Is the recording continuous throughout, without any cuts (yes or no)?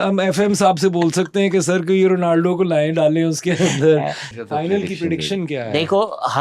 no